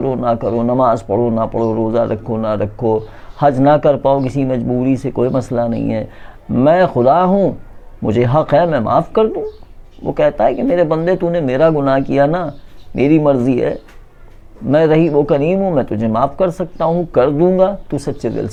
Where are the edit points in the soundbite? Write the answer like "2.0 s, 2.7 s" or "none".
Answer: none